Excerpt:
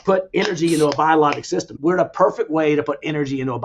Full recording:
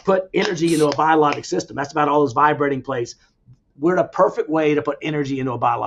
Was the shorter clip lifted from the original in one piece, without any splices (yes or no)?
no